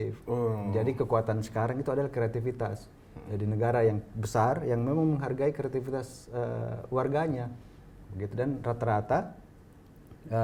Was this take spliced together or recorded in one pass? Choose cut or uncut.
uncut